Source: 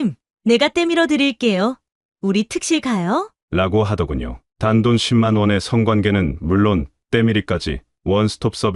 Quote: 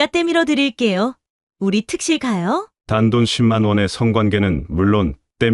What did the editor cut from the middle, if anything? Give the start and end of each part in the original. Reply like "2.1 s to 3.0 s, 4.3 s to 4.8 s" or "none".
3.4 s to 4.5 s